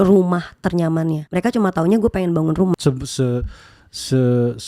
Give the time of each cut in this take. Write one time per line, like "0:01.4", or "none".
0:01.2
0:02.7